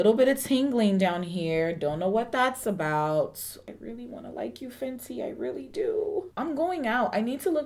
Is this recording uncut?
no; 2 cuts; at 3.5 s, 6.3 s

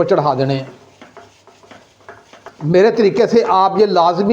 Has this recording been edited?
yes; 1 cut; at 2.5 s

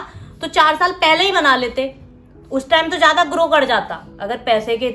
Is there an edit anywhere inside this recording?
no; 0 cuts

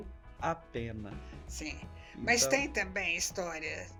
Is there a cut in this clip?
no; 0 cuts

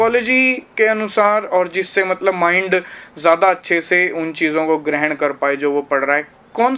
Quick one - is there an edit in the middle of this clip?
no; 0 cuts

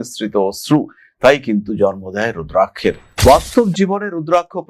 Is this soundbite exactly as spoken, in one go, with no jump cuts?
no; 1 cut; at 3.1 s

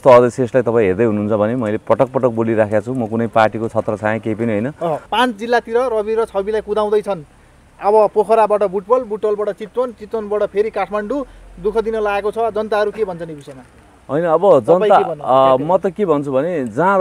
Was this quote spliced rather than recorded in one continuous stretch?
yes; 1 cut; at 5.1 s

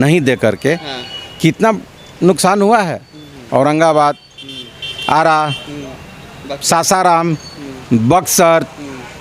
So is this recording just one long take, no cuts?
yes; 0 cuts

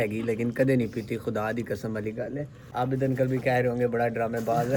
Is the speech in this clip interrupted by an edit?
no; 0 cuts

